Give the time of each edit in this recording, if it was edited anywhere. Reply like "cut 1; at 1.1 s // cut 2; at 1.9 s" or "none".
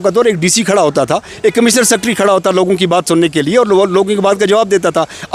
none

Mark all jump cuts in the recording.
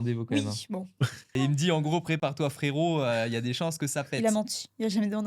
cut 1; at 1.2 s // cut 2; at 4.1 s

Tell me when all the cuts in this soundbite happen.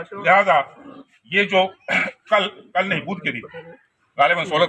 none

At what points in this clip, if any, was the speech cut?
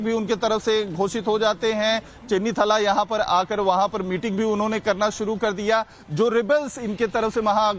none

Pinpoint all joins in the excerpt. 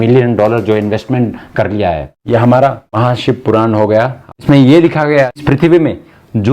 cut 1; at 2.1 s // cut 2; at 2.8 s // cut 3; at 4.3 s // cut 4; at 5.4 s

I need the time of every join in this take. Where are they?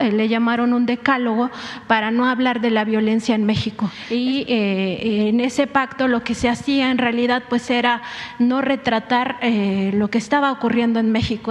cut 1; at 4.0 s

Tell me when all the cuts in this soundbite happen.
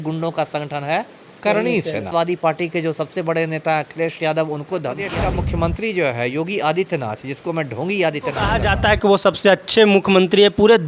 cut 1; at 2.1 s // cut 2; at 5.1 s // cut 3; at 8.5 s

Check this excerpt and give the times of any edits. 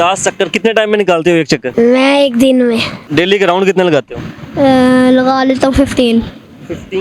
cut 1; at 1.7 s // cut 2; at 2.9 s

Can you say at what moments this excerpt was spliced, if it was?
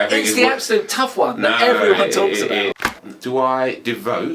cut 1; at 2.8 s

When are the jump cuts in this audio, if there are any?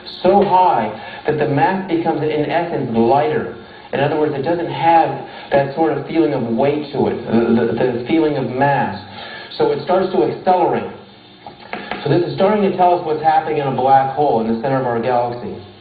none

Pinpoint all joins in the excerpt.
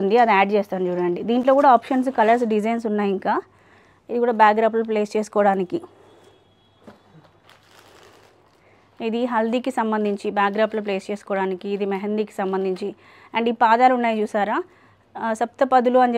none

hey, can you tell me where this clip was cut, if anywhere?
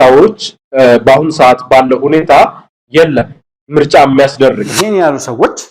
cut 1; at 4.7 s

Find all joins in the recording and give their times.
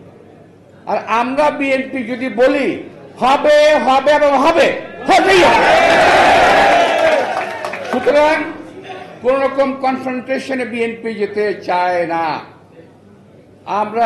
none

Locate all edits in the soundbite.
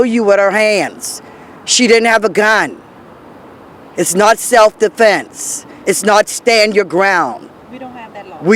none

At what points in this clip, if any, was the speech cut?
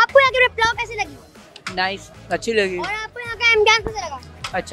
none

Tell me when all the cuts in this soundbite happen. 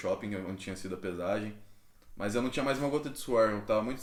none

